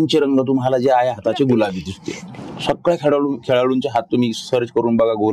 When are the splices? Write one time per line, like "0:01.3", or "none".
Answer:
0:02.2